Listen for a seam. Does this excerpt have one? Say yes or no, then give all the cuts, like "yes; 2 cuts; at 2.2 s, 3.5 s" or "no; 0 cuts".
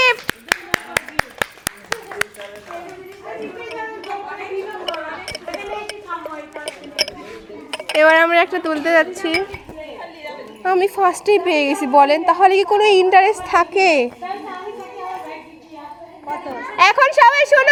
no; 0 cuts